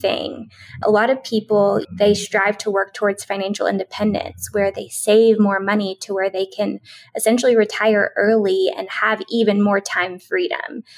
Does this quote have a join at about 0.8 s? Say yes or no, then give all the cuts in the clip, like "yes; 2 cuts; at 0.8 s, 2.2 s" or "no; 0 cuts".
yes; 2 cuts; at 0.8 s, 1.8 s